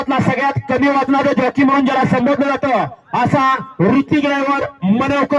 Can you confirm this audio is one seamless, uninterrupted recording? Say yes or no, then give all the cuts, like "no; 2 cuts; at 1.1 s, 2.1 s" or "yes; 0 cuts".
yes; 0 cuts